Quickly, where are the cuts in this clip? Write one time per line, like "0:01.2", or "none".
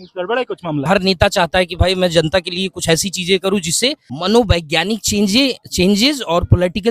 0:00.9
0:04.1